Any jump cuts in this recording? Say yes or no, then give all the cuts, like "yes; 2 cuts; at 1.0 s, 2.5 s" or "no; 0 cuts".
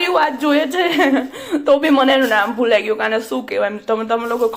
no; 0 cuts